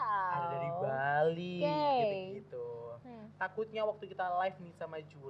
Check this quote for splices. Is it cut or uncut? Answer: cut